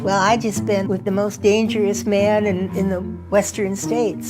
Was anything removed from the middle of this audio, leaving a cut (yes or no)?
yes